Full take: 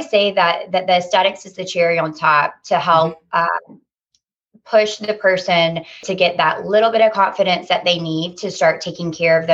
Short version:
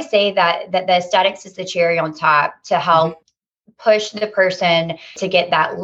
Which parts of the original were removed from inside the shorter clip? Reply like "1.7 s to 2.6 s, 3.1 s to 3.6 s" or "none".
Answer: 3.2 s to 4.1 s